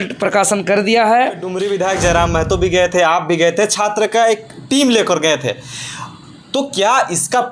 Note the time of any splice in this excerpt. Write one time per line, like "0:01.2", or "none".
0:01.5